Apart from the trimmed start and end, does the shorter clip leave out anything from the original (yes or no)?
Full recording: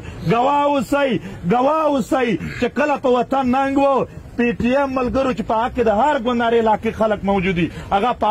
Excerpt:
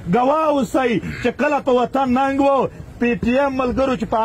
no